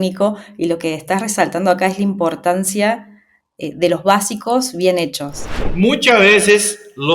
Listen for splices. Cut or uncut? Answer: cut